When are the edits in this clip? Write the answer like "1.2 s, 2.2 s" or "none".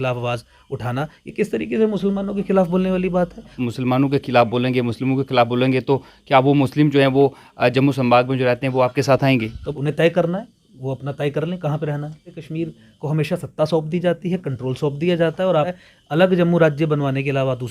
3.6 s, 9.6 s, 12.4 s, 15.8 s

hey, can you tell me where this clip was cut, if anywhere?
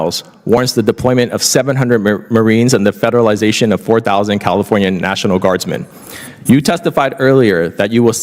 none

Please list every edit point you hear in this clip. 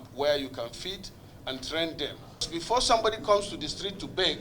2.5 s

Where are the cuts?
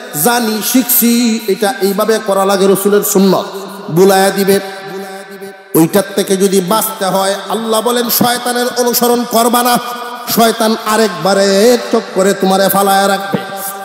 none

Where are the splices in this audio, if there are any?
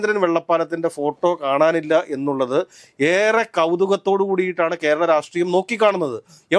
none

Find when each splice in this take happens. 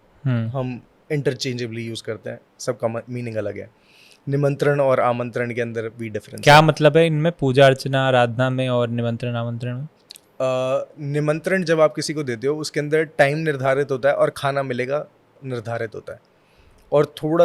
none

